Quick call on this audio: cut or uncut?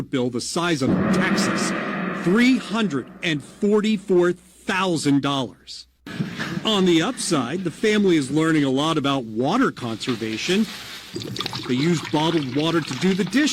cut